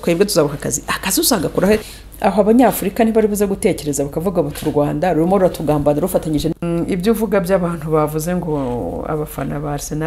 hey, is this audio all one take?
no; 2 cuts; at 1.9 s, 6.5 s

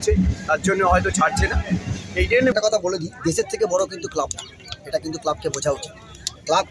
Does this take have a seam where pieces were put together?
yes; 1 cut; at 2.5 s

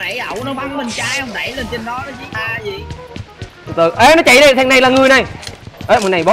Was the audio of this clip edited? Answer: yes; 1 cut; at 2.2 s

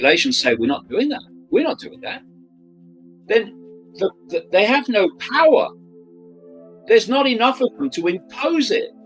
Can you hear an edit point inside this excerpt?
no; 0 cuts

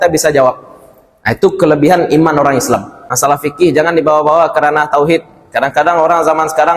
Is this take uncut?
no; 1 cut; at 3.0 s

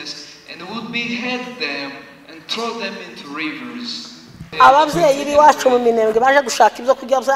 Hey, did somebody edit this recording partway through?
yes; 1 cut; at 4.5 s

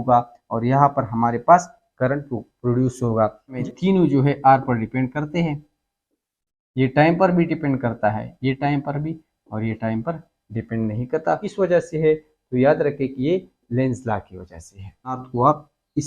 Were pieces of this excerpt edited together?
yes; 3 cuts; at 3.6 s, 11.5 s, 15.2 s

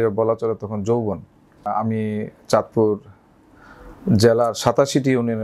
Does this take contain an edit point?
yes; 1 cut; at 1.7 s

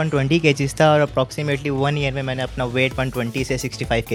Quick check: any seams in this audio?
no; 0 cuts

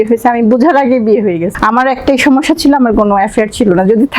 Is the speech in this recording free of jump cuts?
no; 1 cut; at 1.5 s

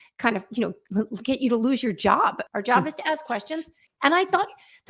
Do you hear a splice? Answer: yes; 2 cuts; at 2.4 s, 3.8 s

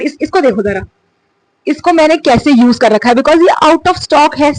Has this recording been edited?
no; 0 cuts

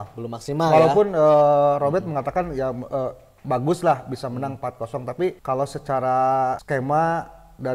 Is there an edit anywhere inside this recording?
yes; 2 cuts; at 5.4 s, 6.6 s

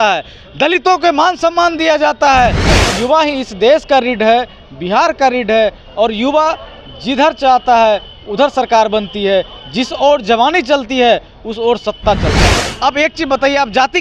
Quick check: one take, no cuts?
no; 2 cuts; at 2.7 s, 12.6 s

